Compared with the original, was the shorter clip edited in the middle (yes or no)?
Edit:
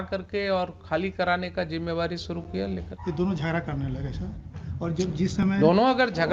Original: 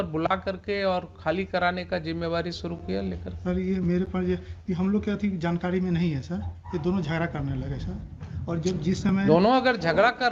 yes